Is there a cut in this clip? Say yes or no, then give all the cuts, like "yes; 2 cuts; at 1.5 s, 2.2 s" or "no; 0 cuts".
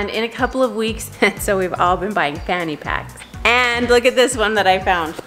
yes; 2 cuts; at 1.0 s, 3.3 s